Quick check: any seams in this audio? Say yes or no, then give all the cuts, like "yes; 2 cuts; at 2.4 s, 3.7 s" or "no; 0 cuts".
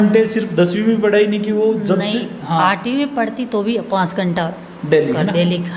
no; 0 cuts